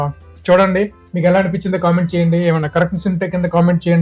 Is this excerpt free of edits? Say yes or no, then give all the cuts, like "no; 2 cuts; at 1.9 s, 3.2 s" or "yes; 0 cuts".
no; 1 cut; at 1.0 s